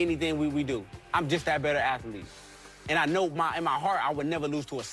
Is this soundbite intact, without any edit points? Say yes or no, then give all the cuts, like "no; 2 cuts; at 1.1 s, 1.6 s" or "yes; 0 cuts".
no; 1 cut; at 0.9 s